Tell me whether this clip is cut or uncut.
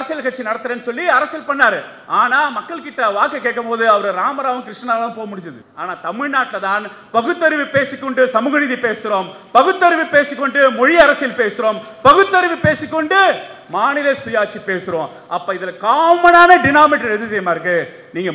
uncut